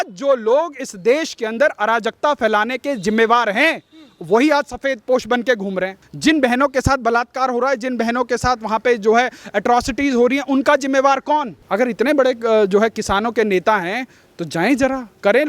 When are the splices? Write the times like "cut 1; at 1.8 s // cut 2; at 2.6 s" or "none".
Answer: cut 1; at 6.0 s // cut 2; at 11.6 s